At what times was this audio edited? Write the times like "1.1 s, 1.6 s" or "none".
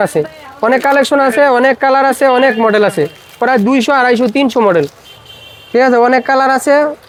none

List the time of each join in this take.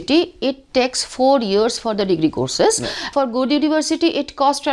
3.1 s

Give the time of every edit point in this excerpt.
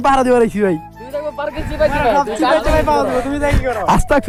none

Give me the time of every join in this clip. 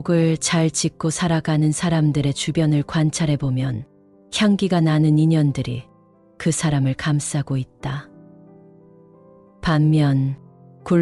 8.0 s, 9.6 s

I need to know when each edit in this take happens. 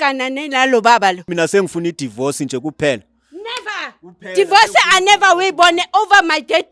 1.2 s

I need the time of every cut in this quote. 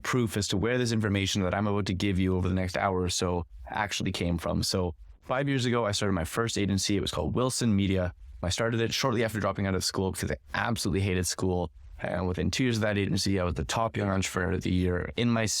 8.4 s

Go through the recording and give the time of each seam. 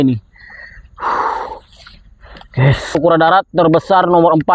3.0 s

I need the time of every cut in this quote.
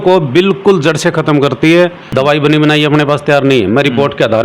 2.0 s

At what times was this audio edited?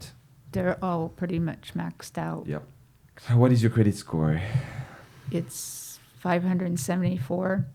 3.1 s

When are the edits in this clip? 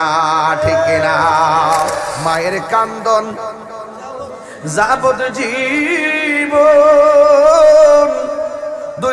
2.1 s

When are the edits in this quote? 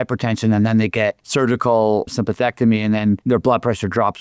1.2 s, 3.2 s

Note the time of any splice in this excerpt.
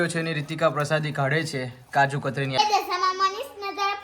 2.6 s

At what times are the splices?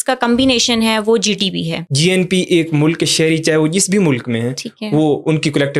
1.8 s

